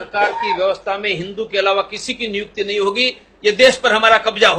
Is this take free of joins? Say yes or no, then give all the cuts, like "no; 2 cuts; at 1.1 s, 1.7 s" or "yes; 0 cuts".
yes; 0 cuts